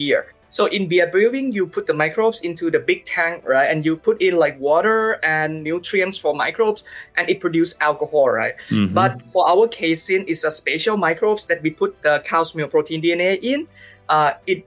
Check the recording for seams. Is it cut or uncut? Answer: uncut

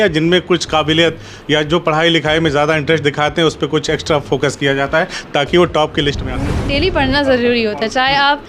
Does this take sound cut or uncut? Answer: cut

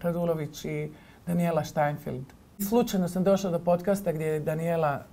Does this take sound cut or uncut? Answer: cut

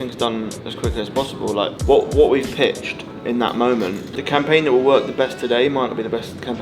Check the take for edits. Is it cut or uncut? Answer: uncut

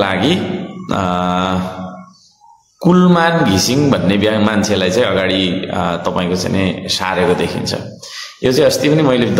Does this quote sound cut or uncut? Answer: uncut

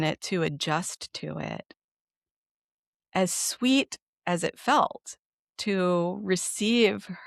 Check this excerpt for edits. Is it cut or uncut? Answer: uncut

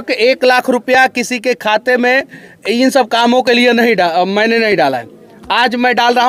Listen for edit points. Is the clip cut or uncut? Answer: uncut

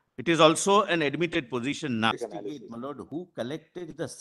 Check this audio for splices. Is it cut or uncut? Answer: cut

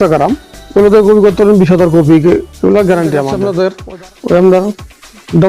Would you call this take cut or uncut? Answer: cut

